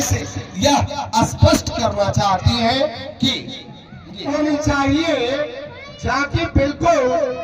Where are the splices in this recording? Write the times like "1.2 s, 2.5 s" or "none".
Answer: 4.3 s